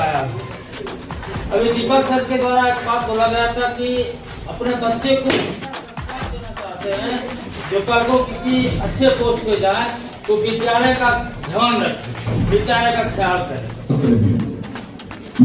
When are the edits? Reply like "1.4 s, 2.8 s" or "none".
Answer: 13.9 s